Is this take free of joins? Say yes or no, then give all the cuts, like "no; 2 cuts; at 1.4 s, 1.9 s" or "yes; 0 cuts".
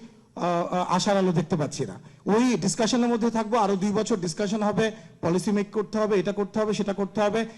yes; 0 cuts